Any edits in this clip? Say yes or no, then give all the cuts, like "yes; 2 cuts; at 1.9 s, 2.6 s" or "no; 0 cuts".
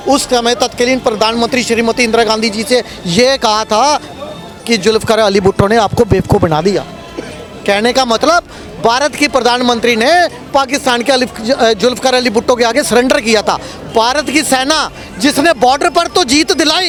no; 0 cuts